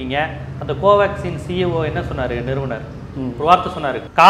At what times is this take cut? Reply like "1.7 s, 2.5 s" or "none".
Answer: none